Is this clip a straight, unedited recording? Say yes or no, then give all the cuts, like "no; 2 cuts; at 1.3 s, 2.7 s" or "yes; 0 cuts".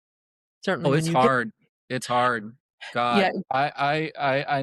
yes; 0 cuts